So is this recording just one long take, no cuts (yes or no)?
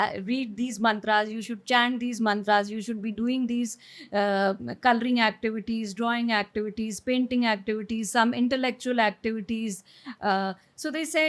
yes